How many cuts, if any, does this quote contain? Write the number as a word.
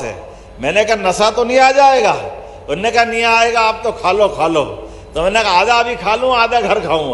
zero